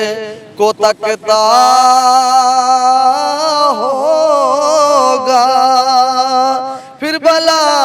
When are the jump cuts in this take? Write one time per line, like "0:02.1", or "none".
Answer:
none